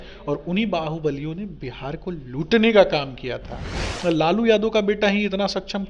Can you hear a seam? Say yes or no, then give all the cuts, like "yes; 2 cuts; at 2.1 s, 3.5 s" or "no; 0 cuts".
yes; 1 cut; at 3.9 s